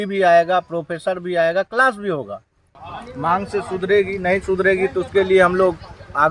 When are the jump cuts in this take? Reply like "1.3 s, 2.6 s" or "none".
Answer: 2.7 s